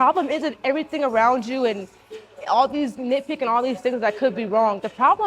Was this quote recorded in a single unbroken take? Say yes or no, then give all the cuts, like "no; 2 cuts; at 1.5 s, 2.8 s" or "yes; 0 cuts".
yes; 0 cuts